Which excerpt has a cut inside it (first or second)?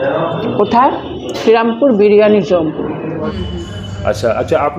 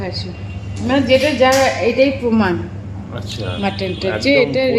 first